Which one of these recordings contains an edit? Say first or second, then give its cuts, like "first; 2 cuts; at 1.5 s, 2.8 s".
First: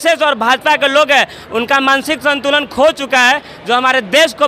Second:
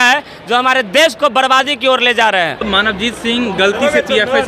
second; 1 cut; at 2.6 s